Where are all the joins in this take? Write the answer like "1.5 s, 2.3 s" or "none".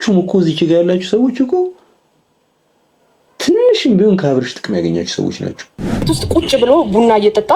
6.1 s